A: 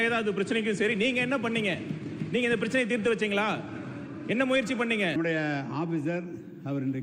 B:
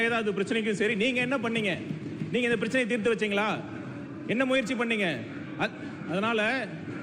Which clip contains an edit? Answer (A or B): A